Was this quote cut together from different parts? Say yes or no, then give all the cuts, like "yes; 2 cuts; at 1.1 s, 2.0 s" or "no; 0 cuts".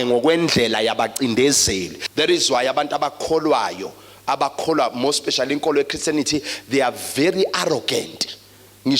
yes; 1 cut; at 2.0 s